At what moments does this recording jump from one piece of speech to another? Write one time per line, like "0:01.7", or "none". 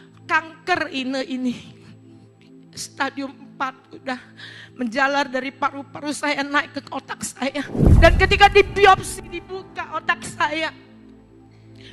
0:07.8